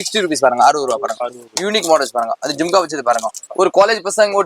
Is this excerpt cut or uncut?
cut